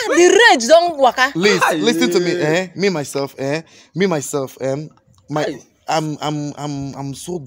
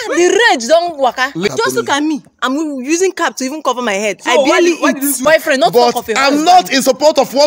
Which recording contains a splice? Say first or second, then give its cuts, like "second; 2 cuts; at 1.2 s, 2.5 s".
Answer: second; 2 cuts; at 1.5 s, 5.2 s